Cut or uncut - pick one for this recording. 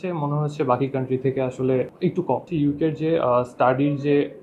cut